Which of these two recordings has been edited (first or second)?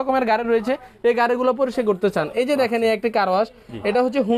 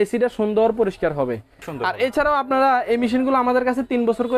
second